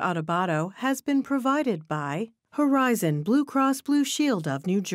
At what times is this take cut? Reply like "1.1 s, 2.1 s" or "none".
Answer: 1.0 s

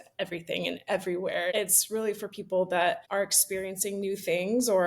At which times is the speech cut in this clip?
1.5 s, 3.0 s

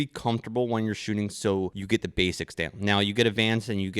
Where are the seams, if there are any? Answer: 1.8 s

